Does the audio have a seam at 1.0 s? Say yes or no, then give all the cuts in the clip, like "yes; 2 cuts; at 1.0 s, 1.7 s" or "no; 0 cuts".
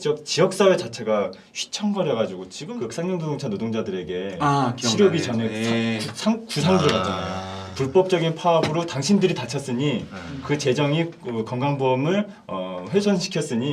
no; 1 cut; at 2.5 s